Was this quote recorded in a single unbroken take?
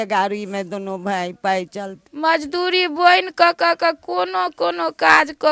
no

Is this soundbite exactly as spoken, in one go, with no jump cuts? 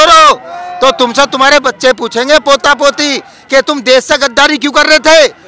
yes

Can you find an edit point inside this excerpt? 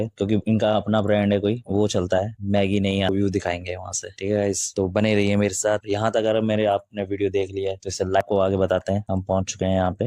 yes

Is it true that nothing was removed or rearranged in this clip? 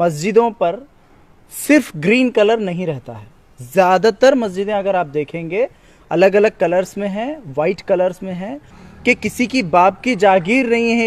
no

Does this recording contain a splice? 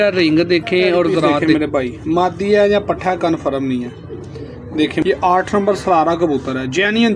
yes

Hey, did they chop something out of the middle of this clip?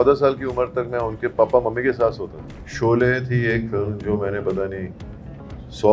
yes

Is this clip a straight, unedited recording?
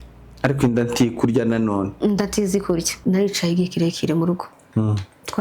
no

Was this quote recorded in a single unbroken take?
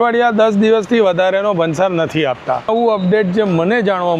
no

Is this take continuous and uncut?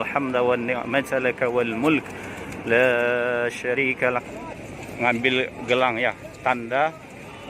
no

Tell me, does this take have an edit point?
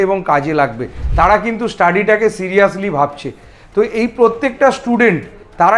yes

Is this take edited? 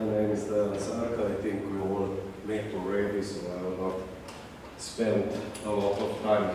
no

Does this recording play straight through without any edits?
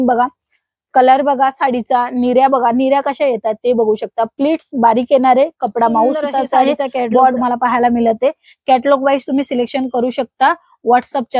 no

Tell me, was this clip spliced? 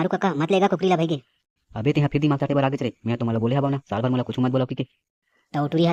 no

